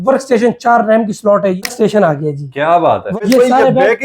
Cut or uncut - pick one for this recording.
cut